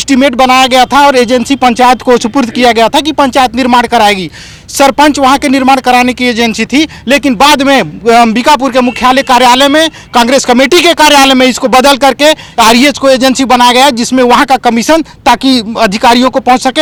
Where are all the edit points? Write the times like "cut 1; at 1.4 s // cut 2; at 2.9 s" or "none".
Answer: none